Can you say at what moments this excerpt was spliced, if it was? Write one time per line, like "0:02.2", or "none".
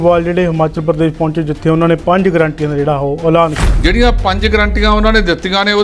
0:03.7

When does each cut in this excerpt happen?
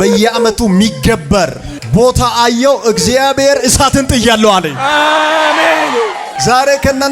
0:01.8
0:06.3

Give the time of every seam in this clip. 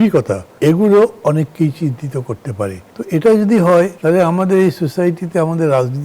none

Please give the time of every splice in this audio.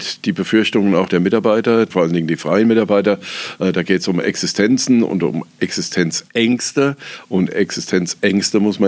none

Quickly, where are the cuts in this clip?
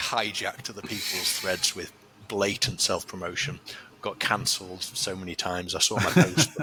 none

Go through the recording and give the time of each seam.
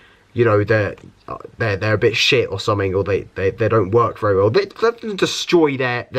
none

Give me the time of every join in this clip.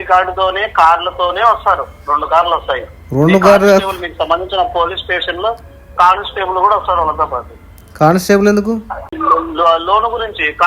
0:09.1

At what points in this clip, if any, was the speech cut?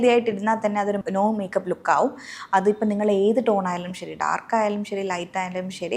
0:01.0

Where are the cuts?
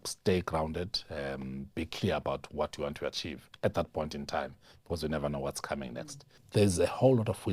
0:06.3

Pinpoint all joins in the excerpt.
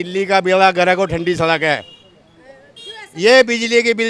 none

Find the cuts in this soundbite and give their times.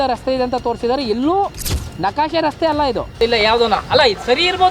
0:03.2

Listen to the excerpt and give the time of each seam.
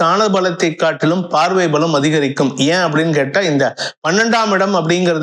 none

